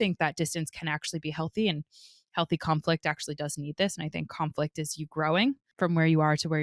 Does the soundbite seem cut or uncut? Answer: cut